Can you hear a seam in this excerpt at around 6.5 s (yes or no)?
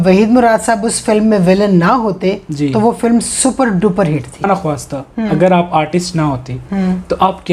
no